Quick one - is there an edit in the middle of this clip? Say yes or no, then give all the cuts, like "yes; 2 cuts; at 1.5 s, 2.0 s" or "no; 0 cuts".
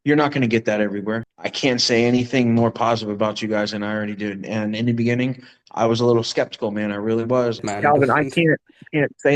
yes; 2 cuts; at 1.3 s, 7.6 s